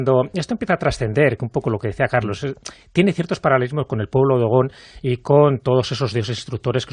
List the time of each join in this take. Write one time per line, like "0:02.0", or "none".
0:04.8